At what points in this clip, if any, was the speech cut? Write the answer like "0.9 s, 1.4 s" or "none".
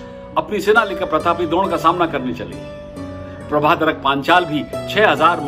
none